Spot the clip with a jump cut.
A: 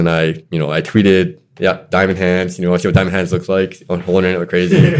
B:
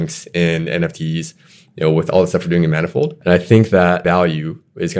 B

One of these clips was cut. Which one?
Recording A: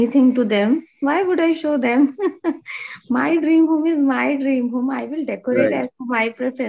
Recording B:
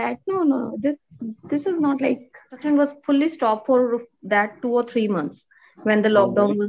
B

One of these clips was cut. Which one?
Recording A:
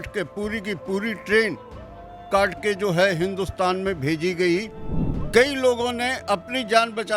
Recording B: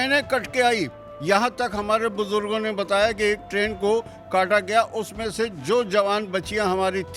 A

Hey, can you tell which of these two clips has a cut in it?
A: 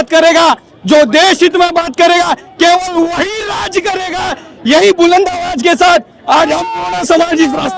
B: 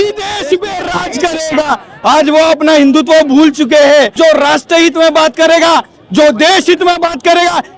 B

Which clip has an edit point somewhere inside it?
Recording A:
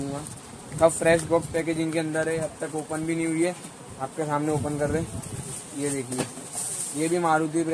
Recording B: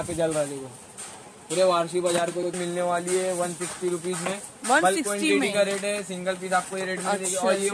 B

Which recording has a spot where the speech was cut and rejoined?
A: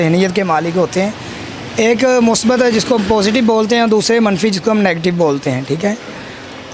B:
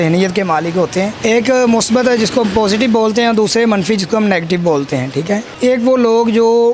B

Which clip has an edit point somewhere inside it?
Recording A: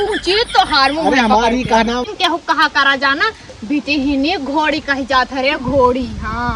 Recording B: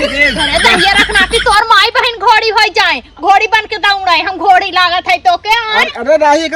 A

